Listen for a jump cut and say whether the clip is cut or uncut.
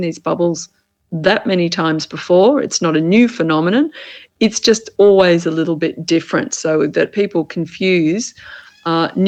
uncut